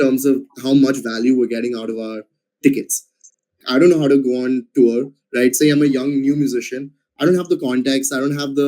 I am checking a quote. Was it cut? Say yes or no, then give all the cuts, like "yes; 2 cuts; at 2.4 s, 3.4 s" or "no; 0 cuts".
yes; 1 cut; at 3.5 s